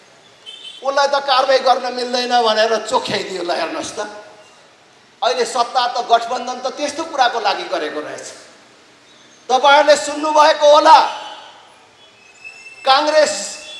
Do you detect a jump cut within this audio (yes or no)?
no